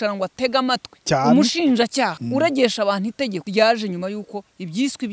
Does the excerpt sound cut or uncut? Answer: cut